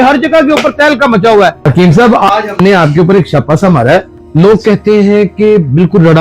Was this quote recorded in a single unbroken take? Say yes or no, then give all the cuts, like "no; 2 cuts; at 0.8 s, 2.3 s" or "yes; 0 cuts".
no; 2 cuts; at 1.6 s, 4.2 s